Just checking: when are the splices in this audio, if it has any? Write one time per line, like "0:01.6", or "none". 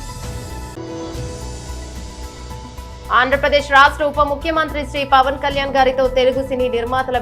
none